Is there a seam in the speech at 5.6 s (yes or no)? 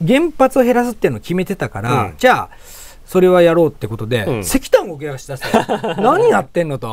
no